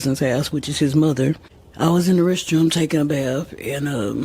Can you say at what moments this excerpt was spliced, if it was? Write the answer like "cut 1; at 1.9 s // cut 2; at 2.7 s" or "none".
cut 1; at 1.6 s

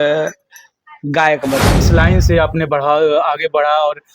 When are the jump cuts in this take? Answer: cut 1; at 1.8 s

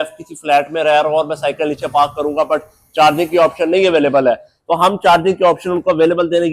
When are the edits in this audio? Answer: none

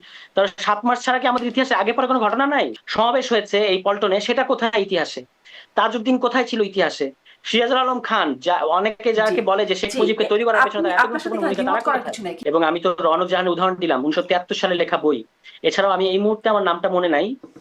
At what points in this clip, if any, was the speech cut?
cut 1; at 2.8 s // cut 2; at 12.3 s

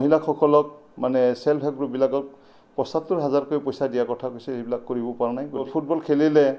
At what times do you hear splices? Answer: cut 1; at 5.7 s

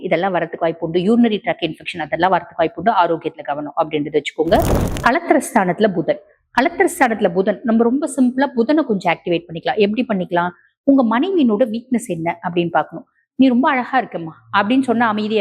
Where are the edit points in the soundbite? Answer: cut 1; at 4.8 s

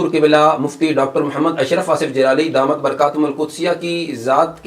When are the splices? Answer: none

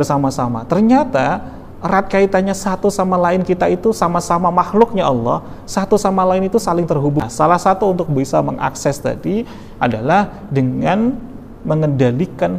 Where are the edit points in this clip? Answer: cut 1; at 7.2 s

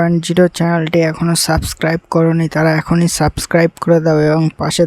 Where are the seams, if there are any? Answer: none

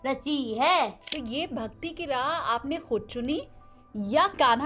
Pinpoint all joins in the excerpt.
cut 1; at 1.1 s

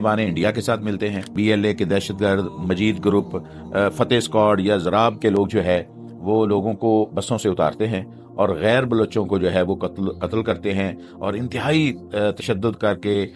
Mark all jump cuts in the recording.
cut 1; at 1.3 s

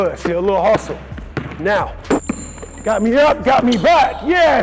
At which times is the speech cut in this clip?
cut 1; at 2.2 s

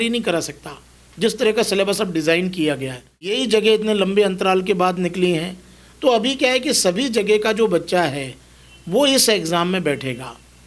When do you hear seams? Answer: cut 1; at 3.3 s

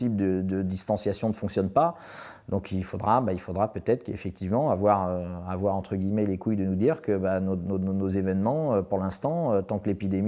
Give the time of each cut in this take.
none

